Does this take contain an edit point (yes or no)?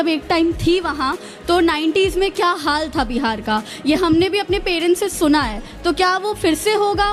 no